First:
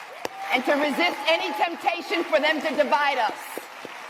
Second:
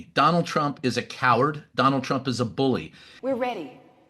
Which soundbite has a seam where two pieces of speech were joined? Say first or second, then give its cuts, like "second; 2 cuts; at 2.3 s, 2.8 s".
second; 1 cut; at 3.0 s